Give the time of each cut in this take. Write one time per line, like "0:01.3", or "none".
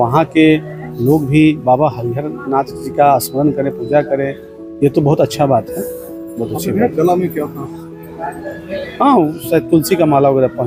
none